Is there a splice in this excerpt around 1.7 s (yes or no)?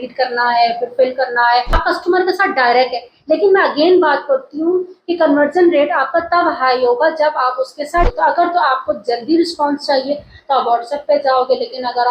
yes